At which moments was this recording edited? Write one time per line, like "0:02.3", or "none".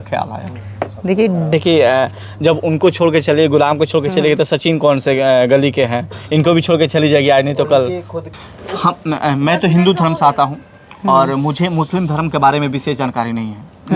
0:01.5
0:08.5